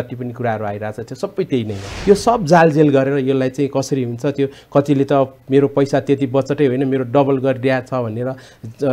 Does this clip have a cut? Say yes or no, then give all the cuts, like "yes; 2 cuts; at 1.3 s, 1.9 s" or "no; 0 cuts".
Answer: yes; 1 cut; at 1.9 s